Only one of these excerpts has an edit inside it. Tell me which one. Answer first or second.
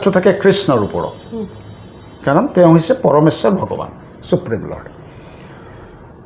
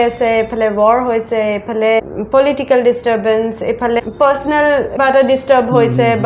second